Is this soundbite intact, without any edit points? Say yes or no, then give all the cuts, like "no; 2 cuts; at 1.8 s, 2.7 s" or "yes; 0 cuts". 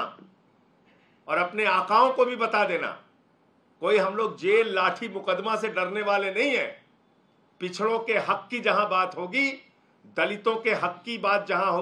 yes; 0 cuts